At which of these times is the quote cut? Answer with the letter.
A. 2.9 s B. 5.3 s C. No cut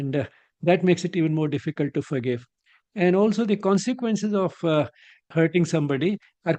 B